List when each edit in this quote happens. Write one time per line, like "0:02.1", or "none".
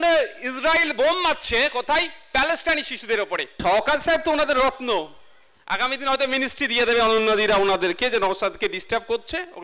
0:03.6